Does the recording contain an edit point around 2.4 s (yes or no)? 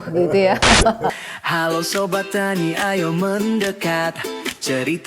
no